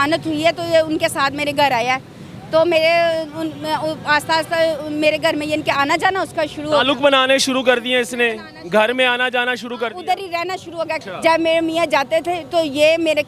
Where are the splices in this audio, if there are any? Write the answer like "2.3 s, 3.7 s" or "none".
11.0 s